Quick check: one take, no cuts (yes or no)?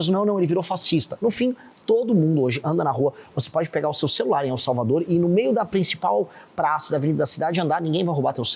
yes